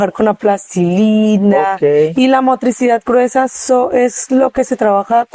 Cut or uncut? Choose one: uncut